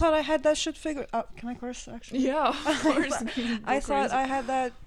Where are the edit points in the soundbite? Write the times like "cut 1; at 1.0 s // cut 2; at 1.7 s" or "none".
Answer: none